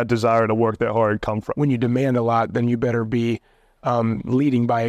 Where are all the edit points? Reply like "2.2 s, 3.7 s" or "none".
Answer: 1.5 s